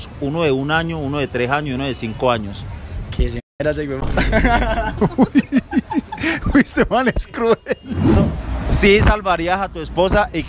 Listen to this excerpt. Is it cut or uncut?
cut